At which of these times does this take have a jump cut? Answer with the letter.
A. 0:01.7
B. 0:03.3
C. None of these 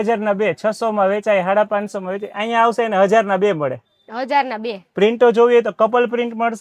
C